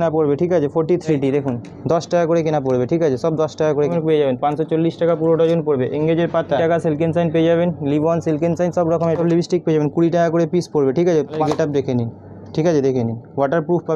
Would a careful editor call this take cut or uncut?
cut